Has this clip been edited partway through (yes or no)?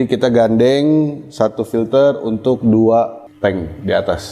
yes